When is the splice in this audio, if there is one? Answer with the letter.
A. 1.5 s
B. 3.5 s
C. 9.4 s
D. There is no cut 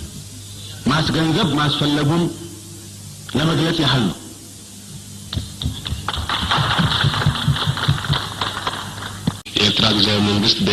C